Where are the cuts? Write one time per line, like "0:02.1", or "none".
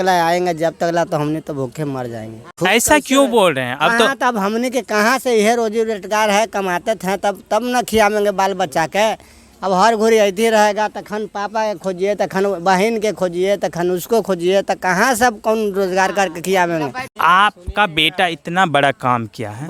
0:02.4
0:17.1